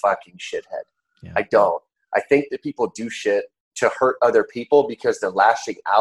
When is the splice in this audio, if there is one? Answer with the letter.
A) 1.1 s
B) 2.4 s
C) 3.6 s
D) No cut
C